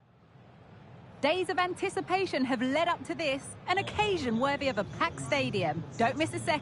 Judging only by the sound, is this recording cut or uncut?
cut